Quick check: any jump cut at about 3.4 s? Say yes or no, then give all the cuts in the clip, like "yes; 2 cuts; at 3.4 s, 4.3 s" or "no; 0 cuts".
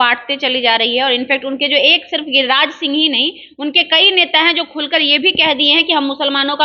no; 0 cuts